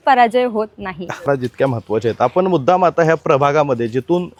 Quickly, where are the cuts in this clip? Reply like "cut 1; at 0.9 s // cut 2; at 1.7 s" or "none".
none